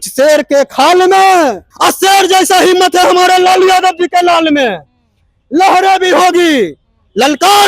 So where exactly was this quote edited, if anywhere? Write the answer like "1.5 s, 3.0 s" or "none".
1.7 s